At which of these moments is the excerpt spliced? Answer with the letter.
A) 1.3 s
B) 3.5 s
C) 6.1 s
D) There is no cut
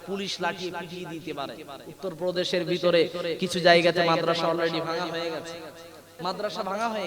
C